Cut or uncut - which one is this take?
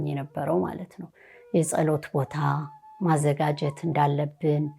uncut